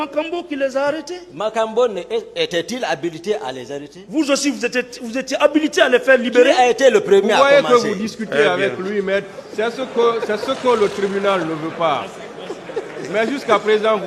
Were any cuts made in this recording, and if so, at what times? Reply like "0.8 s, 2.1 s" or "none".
none